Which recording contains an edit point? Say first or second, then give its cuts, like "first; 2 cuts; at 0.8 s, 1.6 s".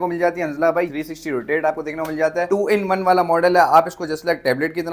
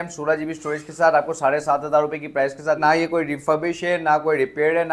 first; 1 cut; at 0.9 s